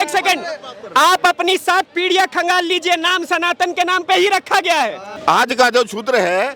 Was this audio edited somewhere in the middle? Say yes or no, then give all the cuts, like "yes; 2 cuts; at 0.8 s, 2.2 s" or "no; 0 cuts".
yes; 1 cut; at 5.1 s